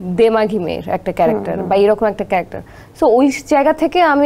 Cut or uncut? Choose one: uncut